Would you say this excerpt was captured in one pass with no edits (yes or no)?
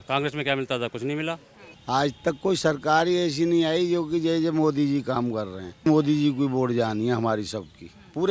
no